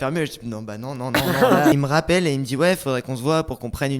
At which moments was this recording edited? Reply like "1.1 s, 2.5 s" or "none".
1.7 s